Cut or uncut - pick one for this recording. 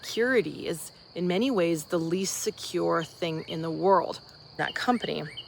cut